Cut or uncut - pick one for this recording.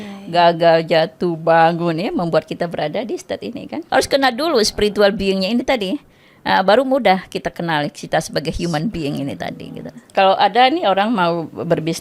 cut